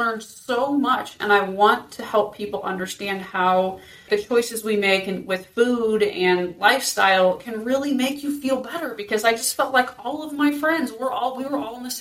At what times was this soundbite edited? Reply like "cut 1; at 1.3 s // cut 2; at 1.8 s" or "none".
cut 1; at 4.0 s